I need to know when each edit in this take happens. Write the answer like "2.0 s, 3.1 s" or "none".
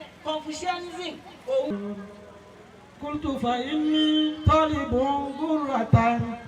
1.7 s